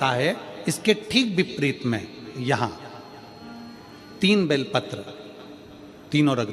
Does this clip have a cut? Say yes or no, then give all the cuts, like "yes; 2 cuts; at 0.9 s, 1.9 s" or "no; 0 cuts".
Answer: no; 0 cuts